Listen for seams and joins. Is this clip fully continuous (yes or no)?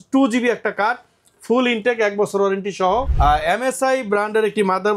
no